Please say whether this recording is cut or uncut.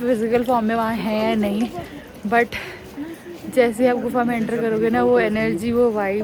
uncut